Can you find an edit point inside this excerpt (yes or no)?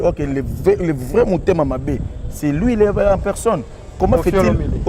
yes